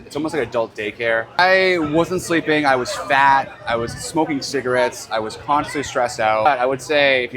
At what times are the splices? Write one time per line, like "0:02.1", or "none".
0:01.4
0:06.5